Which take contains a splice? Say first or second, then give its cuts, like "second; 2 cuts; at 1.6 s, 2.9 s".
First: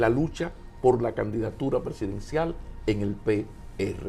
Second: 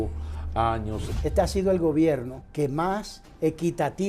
second; 3 cuts; at 1.1 s, 2.4 s, 3.2 s